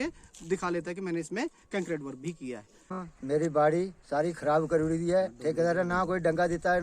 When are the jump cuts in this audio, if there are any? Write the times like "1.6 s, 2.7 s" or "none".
3.0 s